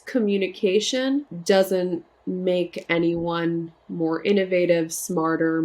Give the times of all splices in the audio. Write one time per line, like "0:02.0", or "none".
0:01.3
0:02.1